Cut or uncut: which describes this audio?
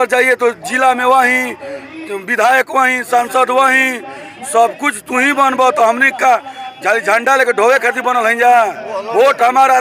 uncut